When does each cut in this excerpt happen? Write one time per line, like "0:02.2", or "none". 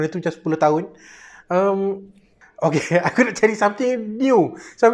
0:02.9